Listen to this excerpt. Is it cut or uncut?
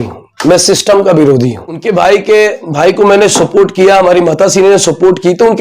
cut